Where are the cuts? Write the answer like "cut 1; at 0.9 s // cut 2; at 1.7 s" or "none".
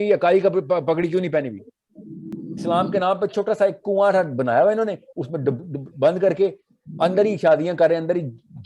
cut 1; at 2.3 s